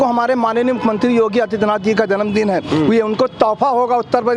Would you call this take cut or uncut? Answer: uncut